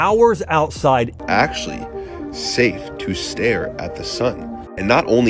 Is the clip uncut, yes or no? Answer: no